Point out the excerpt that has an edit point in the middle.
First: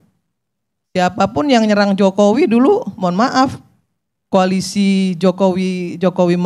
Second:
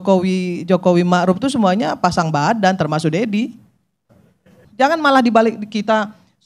second; 1 cut; at 4.6 s

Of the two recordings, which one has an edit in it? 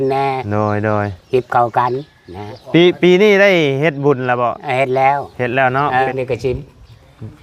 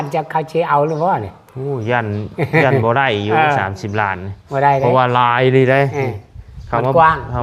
first; 1 cut; at 6.1 s

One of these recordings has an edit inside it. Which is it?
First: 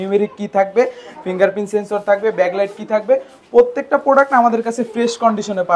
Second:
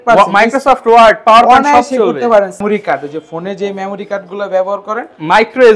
second; 1 cut; at 2.6 s

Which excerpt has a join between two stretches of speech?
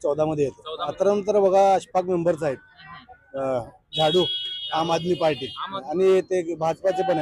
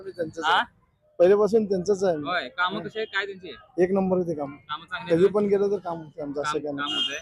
first; 2 cuts; at 0.9 s, 5.8 s

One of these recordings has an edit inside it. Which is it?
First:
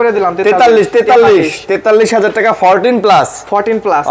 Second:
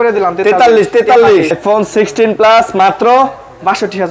second; 1 cut; at 1.6 s

